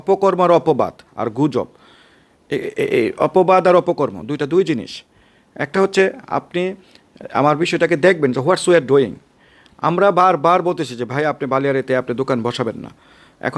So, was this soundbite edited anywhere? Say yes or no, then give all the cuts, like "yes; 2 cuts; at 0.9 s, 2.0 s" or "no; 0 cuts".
no; 0 cuts